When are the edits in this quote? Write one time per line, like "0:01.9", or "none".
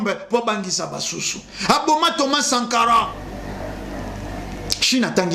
0:03.2